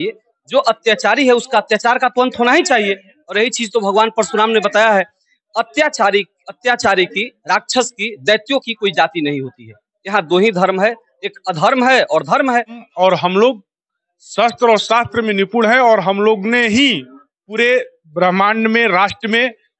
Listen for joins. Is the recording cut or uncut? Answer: cut